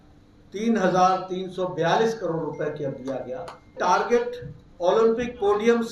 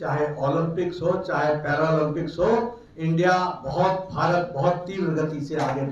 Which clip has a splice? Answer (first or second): first